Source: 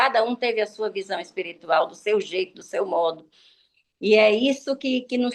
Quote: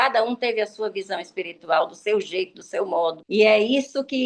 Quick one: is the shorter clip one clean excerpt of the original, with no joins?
no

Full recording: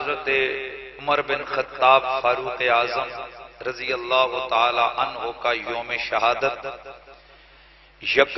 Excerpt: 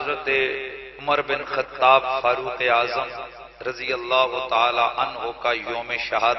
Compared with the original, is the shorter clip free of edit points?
yes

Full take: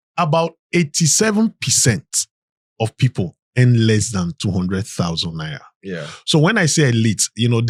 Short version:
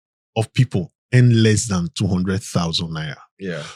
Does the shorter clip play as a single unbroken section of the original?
yes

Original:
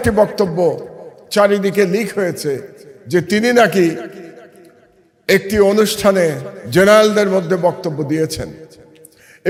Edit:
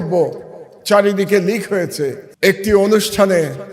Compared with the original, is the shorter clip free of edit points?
no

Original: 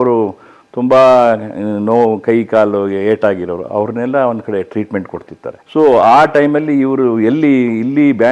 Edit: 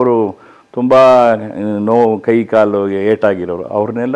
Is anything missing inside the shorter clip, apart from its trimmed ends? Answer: no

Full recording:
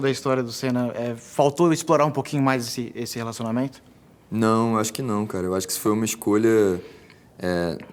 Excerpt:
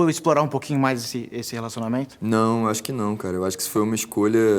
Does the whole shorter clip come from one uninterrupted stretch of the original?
no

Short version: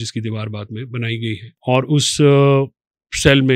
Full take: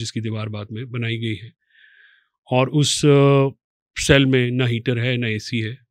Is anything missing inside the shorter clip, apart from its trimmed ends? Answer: yes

